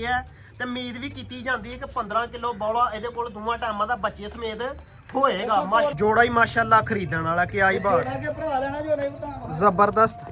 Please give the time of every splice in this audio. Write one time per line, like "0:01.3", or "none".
0:05.9